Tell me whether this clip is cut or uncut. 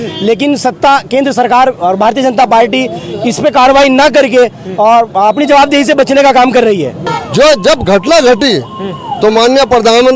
cut